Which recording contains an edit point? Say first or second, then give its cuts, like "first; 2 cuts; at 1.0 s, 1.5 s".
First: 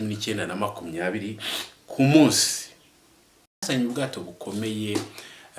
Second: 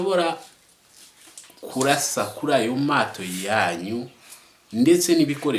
first; 1 cut; at 3.6 s